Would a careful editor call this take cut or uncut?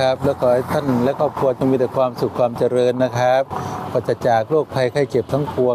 uncut